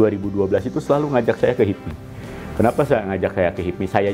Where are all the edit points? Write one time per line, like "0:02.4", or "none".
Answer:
none